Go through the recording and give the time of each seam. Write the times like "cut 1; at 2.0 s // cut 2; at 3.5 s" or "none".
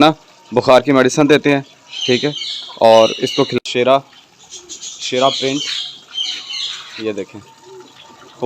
cut 1; at 3.5 s